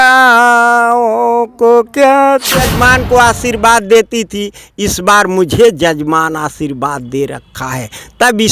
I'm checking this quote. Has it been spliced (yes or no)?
yes